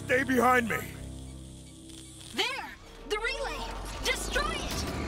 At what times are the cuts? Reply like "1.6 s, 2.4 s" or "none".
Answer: 0.8 s, 2.3 s